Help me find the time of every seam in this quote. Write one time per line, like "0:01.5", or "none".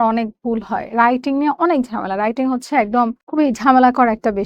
0:03.2